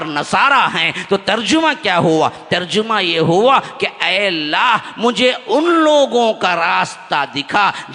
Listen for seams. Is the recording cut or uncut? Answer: uncut